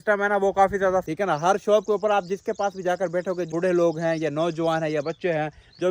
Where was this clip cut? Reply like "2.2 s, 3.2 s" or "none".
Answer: 1.1 s, 3.5 s